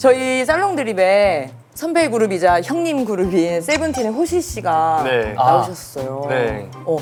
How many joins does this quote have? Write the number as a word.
zero